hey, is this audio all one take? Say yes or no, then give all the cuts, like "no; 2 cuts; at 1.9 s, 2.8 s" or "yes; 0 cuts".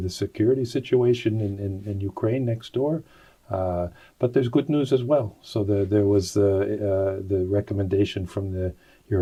yes; 0 cuts